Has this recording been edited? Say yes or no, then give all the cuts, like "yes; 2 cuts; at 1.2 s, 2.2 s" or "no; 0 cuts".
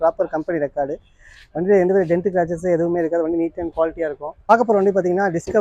yes; 1 cut; at 4.5 s